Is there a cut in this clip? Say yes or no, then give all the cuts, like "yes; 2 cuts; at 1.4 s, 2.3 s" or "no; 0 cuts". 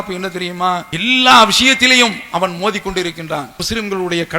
yes; 2 cuts; at 0.9 s, 3.5 s